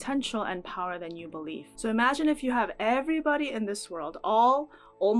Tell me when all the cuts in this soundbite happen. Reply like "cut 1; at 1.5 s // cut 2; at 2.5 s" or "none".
cut 1; at 1.6 s